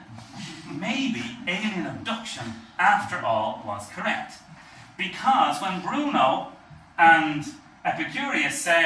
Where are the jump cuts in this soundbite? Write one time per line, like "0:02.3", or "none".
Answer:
0:07.9